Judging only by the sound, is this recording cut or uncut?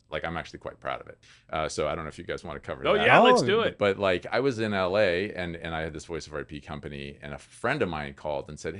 cut